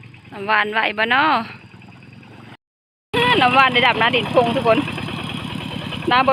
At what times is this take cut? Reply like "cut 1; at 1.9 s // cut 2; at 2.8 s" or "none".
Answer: cut 1; at 2.6 s